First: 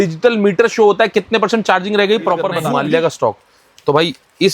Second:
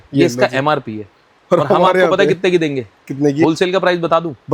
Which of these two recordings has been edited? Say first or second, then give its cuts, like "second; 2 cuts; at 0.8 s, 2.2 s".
first; 1 cut; at 2.6 s